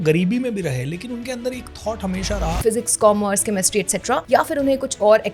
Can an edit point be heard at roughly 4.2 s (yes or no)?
yes